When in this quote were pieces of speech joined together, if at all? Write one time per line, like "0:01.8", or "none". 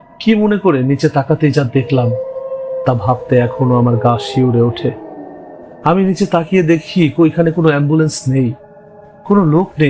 none